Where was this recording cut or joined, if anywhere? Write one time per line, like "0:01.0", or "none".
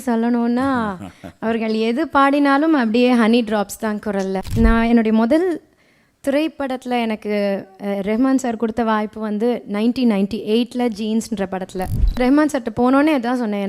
0:04.5
0:12.2